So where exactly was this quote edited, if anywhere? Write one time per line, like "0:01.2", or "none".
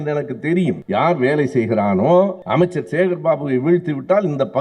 0:00.8
0:02.4

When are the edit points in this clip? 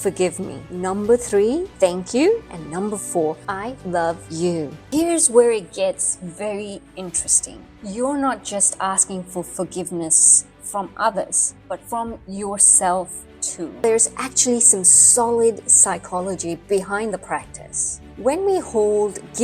0:04.8
0:13.8

